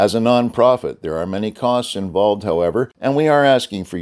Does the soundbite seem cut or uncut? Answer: cut